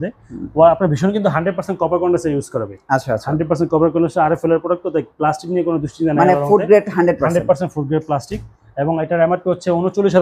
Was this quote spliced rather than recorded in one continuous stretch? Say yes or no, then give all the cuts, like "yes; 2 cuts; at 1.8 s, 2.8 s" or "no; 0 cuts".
no; 0 cuts